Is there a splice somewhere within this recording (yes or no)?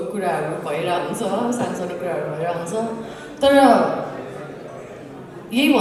no